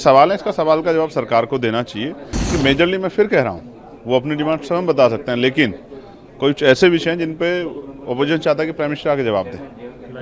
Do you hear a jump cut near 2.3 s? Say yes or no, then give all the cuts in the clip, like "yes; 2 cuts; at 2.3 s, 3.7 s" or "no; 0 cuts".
yes; 1 cut; at 2.3 s